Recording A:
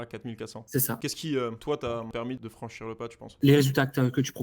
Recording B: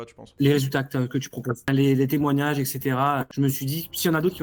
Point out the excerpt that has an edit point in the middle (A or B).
A